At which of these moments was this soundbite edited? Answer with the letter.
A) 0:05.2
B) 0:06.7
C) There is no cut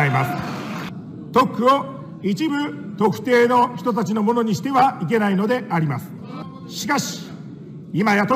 C